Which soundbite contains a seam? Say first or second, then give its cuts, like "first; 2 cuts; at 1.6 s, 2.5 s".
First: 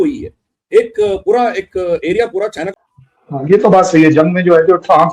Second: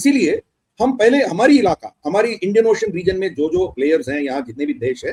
first; 1 cut; at 2.7 s